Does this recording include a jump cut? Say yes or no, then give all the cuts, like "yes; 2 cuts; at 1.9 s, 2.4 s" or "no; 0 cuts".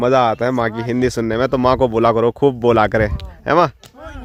no; 0 cuts